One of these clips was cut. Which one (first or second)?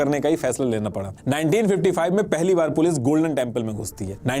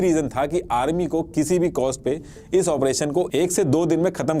first